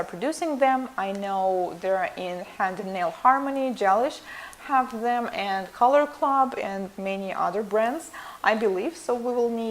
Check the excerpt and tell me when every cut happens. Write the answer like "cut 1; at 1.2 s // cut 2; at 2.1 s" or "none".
cut 1; at 6.3 s